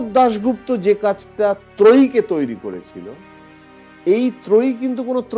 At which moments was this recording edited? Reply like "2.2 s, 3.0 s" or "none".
none